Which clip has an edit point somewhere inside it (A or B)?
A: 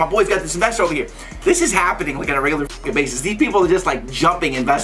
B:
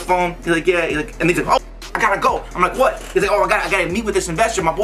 A